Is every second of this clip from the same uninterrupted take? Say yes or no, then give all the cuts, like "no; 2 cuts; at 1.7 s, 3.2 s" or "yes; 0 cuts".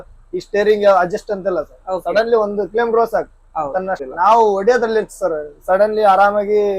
no; 1 cut; at 4.0 s